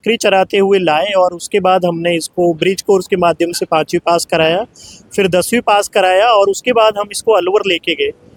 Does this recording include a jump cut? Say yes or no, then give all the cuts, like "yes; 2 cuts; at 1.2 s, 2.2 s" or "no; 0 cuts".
no; 0 cuts